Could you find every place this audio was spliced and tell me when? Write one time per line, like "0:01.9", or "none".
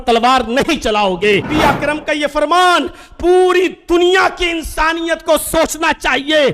0:01.5